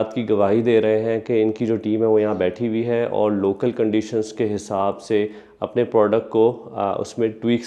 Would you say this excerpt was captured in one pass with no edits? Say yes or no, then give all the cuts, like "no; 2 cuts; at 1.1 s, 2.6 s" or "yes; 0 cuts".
yes; 0 cuts